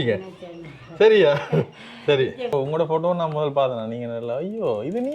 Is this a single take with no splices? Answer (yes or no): no